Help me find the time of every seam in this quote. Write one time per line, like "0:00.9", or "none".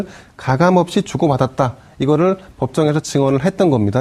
0:01.4